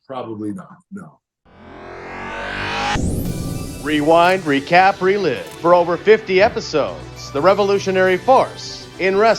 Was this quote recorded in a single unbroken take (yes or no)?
no